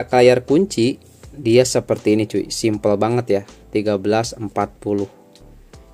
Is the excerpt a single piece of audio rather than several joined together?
yes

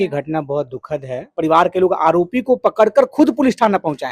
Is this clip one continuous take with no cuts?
no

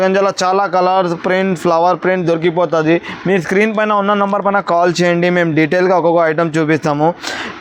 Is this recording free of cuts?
yes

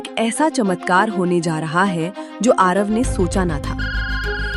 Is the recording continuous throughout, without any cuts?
yes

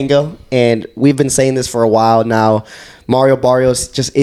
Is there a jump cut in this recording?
no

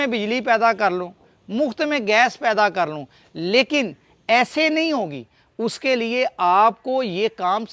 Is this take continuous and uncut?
yes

